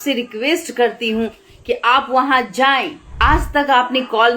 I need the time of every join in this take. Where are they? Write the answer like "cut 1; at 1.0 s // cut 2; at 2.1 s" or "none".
cut 1; at 3.0 s